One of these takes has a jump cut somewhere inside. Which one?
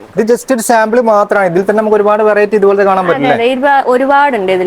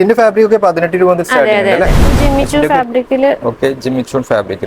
second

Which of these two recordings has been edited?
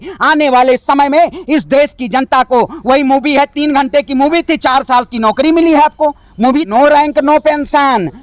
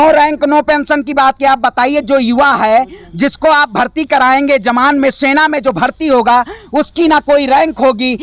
first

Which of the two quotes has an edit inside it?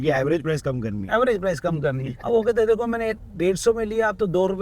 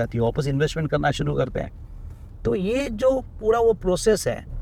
first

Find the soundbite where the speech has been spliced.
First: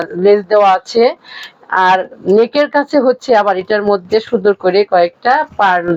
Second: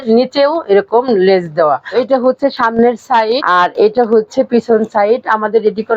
second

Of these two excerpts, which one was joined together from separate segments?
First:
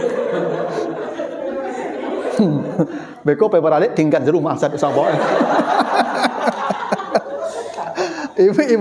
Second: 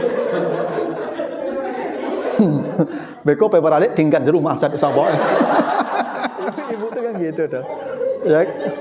second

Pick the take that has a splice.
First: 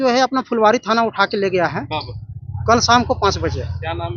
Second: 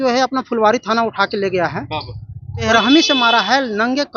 second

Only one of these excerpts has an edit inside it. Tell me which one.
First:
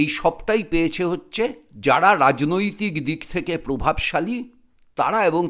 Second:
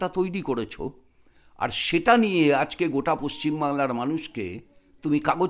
first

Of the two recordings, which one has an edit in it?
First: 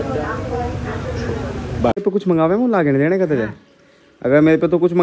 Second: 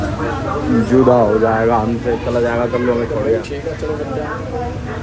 first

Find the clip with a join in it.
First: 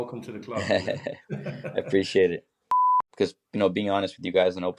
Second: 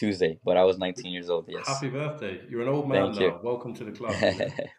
first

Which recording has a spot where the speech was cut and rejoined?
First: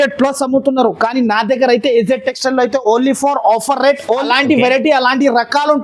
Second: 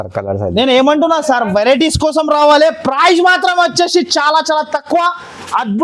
first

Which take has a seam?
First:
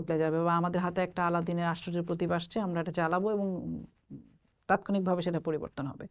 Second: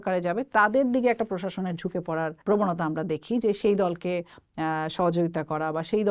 second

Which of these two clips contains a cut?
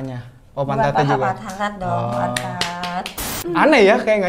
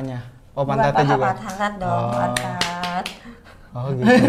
first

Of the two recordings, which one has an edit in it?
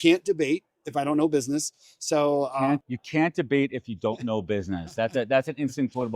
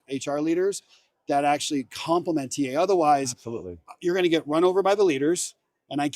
first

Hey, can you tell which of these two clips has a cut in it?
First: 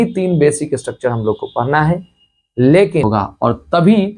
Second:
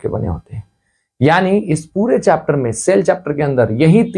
first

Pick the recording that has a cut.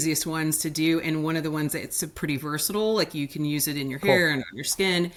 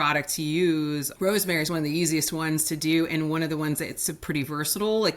second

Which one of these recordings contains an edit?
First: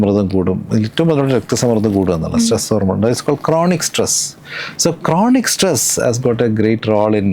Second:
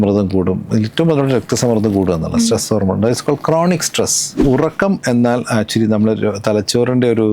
second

